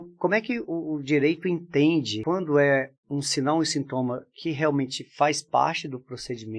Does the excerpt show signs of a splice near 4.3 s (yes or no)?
no